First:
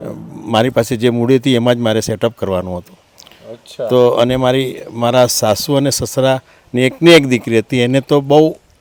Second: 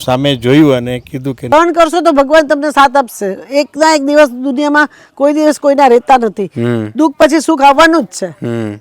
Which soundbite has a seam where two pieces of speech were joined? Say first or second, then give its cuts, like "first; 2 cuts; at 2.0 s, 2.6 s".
second; 1 cut; at 1.5 s